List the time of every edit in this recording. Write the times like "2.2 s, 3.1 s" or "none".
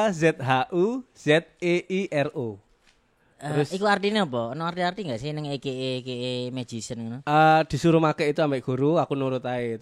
none